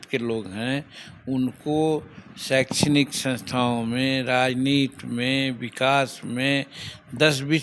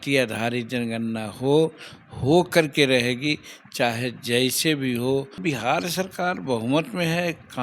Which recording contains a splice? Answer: second; 1 cut; at 5.4 s

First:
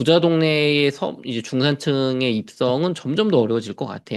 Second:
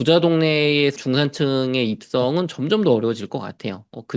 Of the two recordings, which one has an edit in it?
second; 1 cut; at 1.0 s

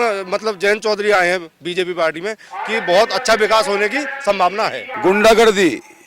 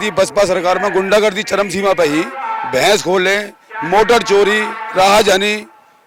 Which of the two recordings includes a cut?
first; 1 cut; at 4.8 s

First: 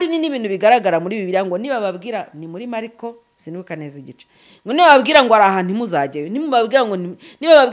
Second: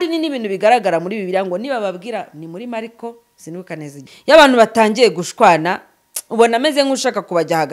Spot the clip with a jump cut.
second; 1 cut; at 4.1 s

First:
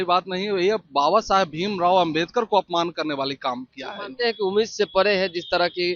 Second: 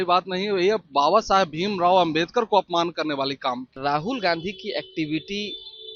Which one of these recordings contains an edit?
second; 1 cut; at 3.8 s

